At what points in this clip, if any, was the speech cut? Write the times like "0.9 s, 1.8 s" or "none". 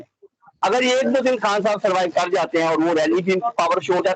none